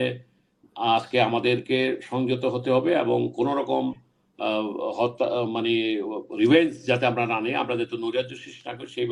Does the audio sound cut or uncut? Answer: uncut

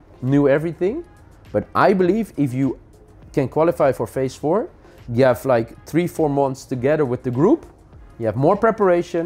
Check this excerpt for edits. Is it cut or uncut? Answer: uncut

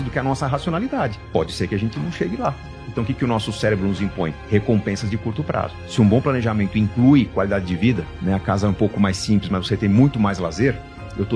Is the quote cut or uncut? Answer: uncut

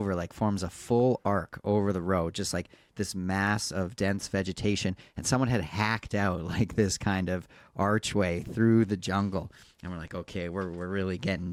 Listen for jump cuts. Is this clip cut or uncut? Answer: uncut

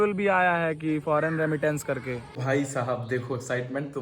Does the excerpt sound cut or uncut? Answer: cut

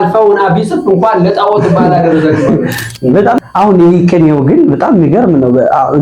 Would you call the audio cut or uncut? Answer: cut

